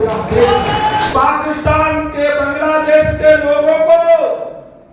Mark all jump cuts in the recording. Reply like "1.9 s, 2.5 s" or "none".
1.1 s